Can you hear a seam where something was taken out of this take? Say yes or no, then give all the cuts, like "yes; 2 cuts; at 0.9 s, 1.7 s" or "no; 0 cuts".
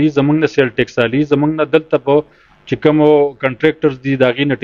no; 0 cuts